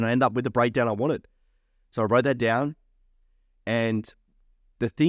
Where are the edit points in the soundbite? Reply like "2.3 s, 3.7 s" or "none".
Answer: none